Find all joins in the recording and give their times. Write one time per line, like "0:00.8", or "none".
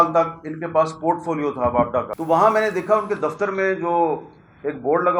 0:02.1